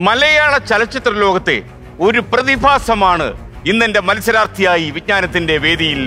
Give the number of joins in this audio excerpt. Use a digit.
0